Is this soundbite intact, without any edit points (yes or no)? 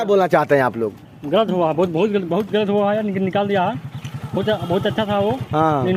yes